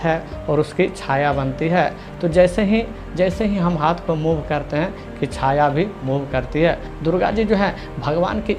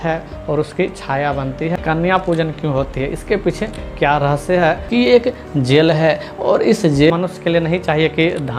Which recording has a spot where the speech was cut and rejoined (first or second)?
second